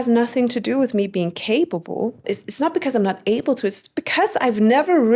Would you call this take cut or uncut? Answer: cut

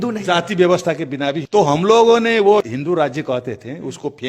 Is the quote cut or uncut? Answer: cut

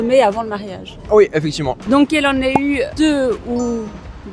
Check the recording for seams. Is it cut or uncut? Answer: cut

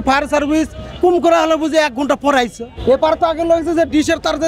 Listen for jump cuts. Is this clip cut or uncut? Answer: cut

